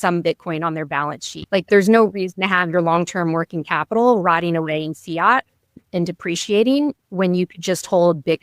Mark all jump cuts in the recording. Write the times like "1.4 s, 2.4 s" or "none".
1.4 s, 5.8 s